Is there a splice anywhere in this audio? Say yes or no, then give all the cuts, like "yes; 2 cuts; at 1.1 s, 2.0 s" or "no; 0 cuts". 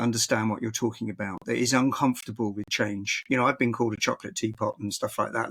no; 0 cuts